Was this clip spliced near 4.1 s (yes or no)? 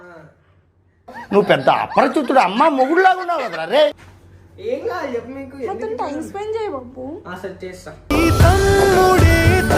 yes